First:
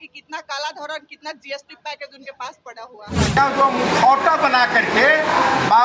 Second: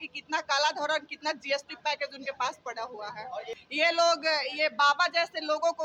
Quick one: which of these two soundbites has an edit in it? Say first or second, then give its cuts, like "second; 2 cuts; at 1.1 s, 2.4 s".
first; 1 cut; at 3.4 s